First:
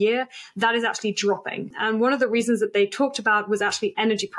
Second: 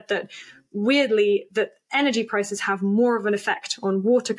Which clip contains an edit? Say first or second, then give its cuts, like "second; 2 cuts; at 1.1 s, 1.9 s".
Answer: first; 1 cut; at 1.7 s